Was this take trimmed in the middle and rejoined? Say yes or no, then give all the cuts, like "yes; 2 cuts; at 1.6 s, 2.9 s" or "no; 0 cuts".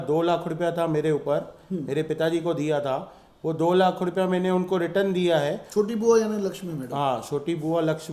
no; 0 cuts